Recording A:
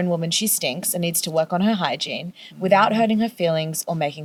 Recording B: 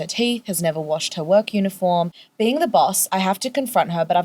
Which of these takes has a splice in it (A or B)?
B